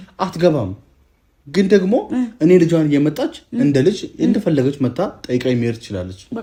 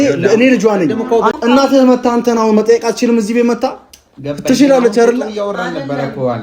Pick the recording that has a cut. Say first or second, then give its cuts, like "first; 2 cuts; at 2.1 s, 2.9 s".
second; 1 cut; at 1.4 s